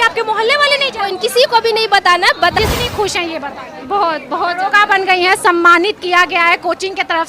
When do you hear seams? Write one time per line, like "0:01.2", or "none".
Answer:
0:02.6